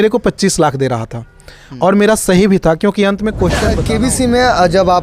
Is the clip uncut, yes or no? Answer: no